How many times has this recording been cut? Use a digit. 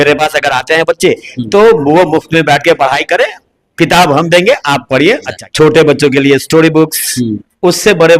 1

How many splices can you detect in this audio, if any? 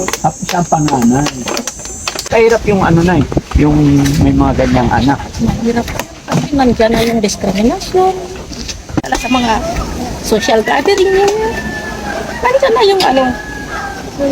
2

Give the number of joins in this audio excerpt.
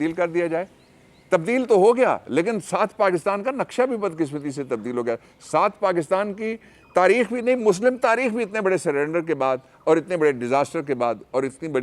0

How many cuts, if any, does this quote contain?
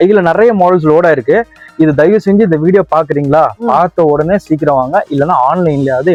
0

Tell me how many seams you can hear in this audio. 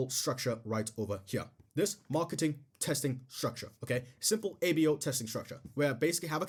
0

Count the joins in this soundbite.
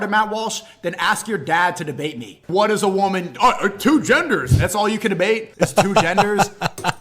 2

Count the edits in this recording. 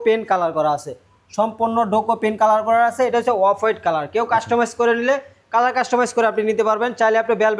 0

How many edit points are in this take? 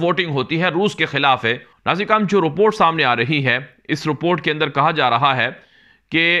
1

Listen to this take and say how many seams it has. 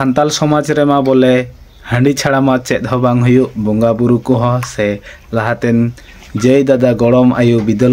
0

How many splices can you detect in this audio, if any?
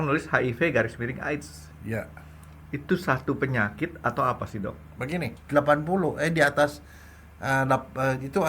1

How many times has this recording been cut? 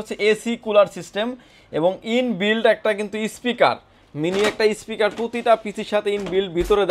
0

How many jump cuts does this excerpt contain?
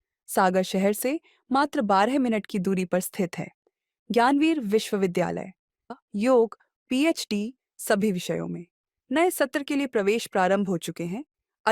1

